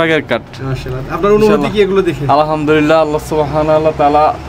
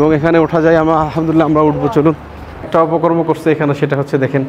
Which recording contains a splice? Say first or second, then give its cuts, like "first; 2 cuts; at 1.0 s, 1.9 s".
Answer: second; 1 cut; at 2.7 s